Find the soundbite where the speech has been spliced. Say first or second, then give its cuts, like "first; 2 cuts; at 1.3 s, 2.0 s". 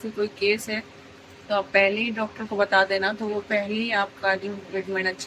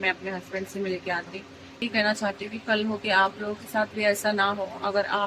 second; 1 cut; at 1.8 s